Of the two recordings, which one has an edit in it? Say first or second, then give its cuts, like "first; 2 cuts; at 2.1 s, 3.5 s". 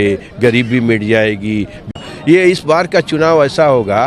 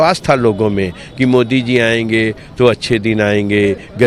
first; 1 cut; at 1.8 s